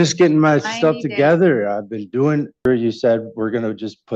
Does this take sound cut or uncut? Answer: cut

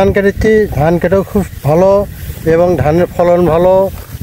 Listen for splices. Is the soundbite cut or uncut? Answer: uncut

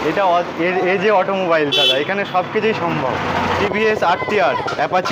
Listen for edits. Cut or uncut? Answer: cut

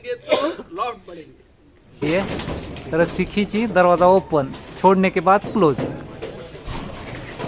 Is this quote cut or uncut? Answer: cut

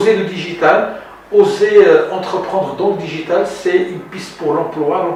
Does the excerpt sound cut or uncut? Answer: uncut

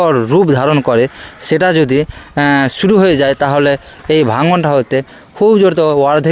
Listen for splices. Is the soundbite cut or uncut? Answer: uncut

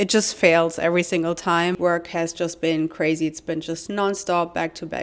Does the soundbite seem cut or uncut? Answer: cut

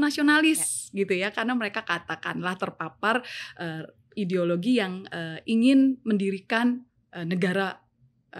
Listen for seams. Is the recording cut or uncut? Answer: uncut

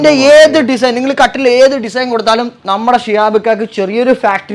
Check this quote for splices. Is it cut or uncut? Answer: uncut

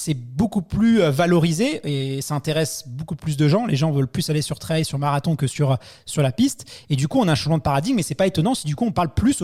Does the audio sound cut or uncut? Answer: uncut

